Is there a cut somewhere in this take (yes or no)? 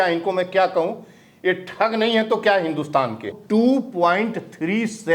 yes